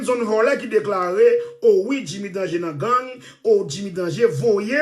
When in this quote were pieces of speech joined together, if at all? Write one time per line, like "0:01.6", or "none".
none